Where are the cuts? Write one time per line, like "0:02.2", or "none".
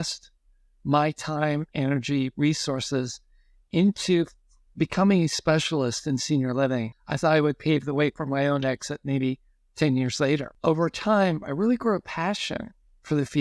0:07.0
0:10.5